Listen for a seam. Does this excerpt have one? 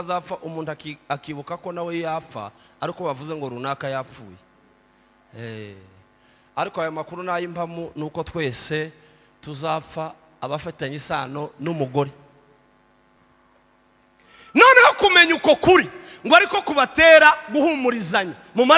yes; 1 cut; at 13.2 s

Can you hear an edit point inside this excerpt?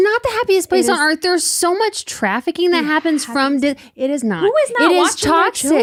no; 0 cuts

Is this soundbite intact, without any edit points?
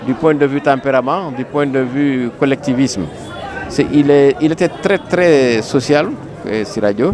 yes; 0 cuts

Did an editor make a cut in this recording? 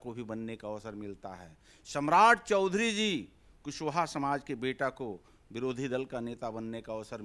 no; 0 cuts

